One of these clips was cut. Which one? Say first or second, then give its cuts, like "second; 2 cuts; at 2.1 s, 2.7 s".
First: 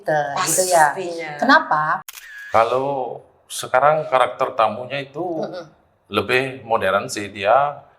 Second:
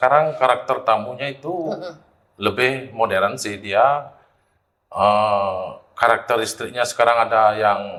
first; 1 cut; at 2.0 s